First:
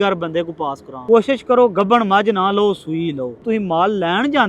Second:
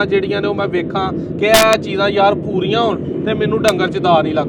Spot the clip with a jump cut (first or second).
first